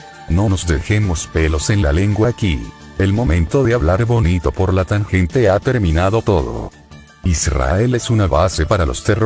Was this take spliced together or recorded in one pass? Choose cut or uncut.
cut